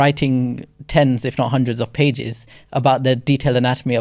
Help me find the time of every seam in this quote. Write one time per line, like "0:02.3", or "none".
none